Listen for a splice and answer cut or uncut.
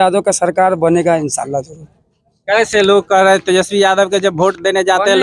uncut